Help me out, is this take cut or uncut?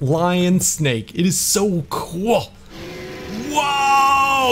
cut